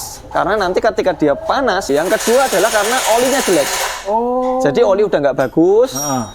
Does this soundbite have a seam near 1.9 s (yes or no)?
yes